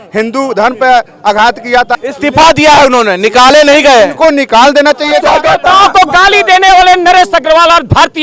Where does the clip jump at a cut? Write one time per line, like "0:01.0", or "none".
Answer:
0:02.1
0:05.3